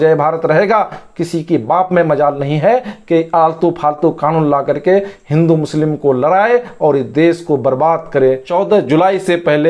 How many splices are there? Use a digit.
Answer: 1